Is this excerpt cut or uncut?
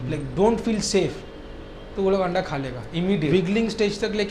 cut